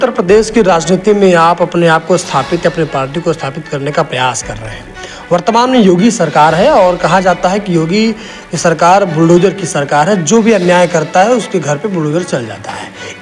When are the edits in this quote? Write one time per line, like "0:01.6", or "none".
none